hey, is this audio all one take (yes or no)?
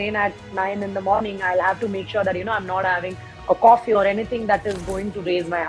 yes